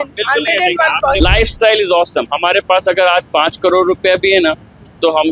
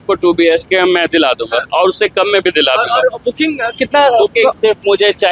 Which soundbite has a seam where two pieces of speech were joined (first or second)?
first